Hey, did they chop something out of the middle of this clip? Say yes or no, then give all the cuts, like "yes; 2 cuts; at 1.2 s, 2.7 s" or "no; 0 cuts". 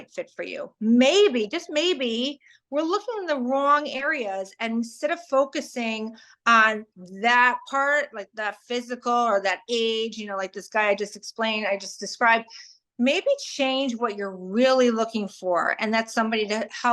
no; 0 cuts